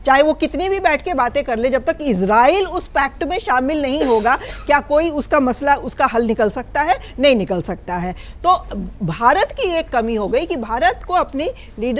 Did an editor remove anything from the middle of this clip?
no; 0 cuts

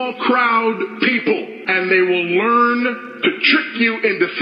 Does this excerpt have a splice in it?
no; 0 cuts

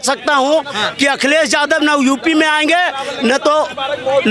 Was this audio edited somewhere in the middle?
no; 0 cuts

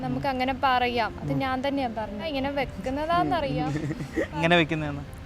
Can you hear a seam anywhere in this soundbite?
yes; 2 cuts; at 2.3 s, 4.4 s

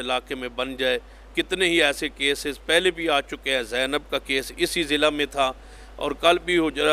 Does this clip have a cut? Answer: no; 0 cuts

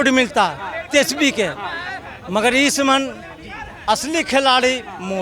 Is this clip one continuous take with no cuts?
yes; 0 cuts

